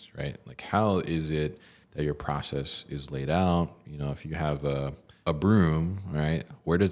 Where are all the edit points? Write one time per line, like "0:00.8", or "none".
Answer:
0:05.1